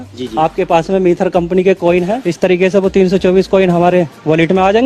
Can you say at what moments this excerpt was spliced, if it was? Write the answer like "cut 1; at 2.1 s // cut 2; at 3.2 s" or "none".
cut 1; at 2.2 s